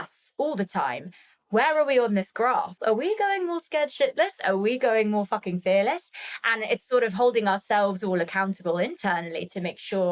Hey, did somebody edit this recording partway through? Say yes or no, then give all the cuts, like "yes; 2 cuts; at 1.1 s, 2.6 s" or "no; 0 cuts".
yes; 1 cut; at 2.8 s